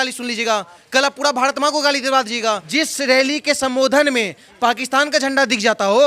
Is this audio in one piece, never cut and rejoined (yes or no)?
no